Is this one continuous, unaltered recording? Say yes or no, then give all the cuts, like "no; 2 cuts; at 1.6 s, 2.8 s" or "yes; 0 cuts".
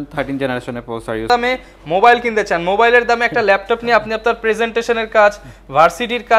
no; 1 cut; at 1.3 s